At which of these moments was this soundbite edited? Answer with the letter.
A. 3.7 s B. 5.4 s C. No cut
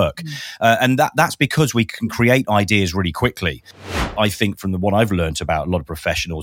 A